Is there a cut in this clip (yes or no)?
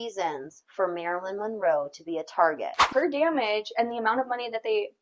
yes